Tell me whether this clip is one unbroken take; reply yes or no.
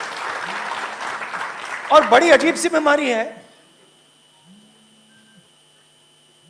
yes